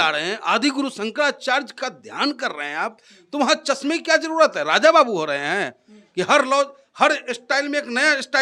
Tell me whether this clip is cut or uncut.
uncut